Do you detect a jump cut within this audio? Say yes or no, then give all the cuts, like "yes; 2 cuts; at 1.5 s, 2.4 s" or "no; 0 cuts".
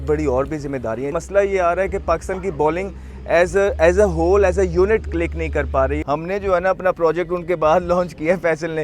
yes; 2 cuts; at 1.1 s, 6.0 s